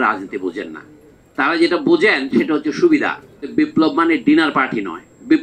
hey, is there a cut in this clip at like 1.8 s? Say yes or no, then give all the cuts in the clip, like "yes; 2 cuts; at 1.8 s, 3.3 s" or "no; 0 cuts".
no; 1 cut; at 3.5 s